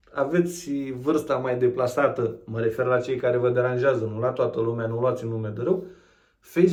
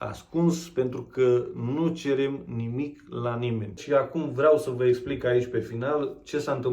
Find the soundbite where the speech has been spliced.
second; 1 cut; at 3.8 s

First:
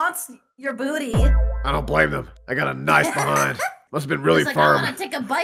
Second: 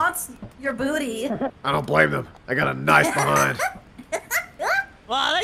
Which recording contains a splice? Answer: first; 1 cut; at 3.8 s

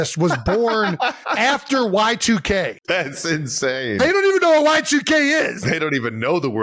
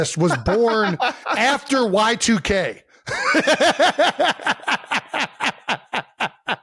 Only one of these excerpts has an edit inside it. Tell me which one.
first; 2 cuts; at 2.8 s, 5.6 s

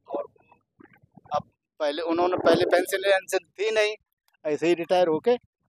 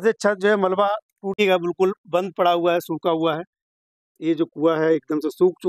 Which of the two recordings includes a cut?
second; 1 cut; at 1.3 s

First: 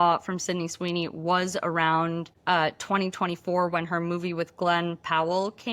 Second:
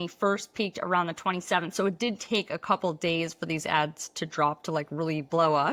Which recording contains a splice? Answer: first; 1 cut; at 2.3 s

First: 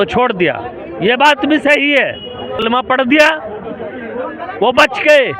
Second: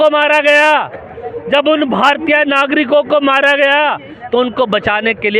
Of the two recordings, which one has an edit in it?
first; 1 cut; at 2.6 s

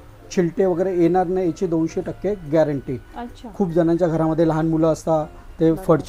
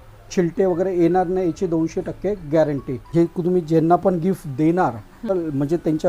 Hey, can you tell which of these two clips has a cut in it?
second; 2 cuts; at 3.0 s, 5.3 s

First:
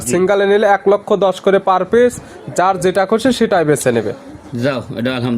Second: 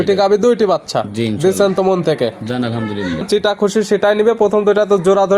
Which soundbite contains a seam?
second; 1 cut; at 3.3 s

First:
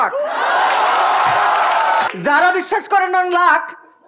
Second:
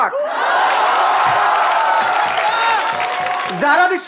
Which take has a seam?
first; 1 cut; at 2.1 s

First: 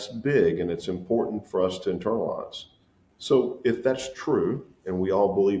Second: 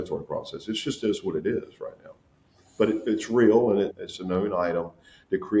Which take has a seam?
second; 1 cut; at 3.9 s

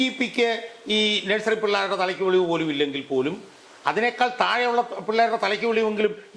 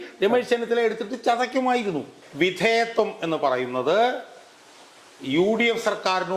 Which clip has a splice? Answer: second; 1 cut; at 2.2 s

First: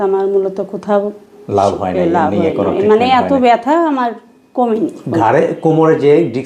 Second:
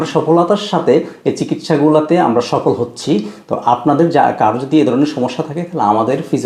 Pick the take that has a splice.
first; 1 cut; at 5.0 s

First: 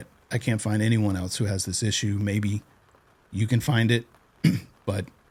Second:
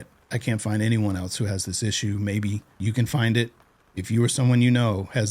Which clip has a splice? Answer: second; 2 cuts; at 2.7 s, 3.7 s

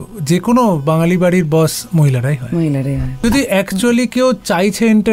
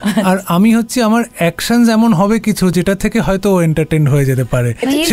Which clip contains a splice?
first; 1 cut; at 3.2 s

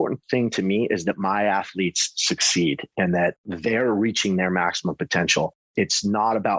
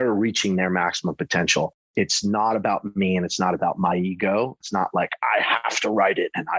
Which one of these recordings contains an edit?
second; 1 cut; at 4.6 s

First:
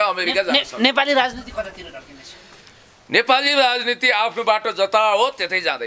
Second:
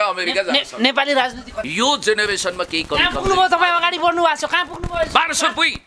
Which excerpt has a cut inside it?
second; 1 cut; at 1.7 s

